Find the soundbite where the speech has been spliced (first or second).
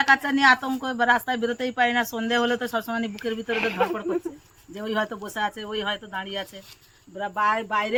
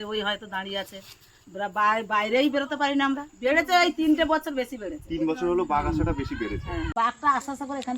second